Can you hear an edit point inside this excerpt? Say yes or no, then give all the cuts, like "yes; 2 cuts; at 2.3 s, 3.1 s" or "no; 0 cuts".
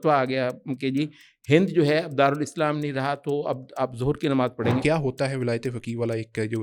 yes; 1 cut; at 4.8 s